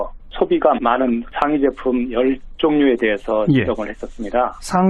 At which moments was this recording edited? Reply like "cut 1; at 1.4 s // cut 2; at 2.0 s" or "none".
none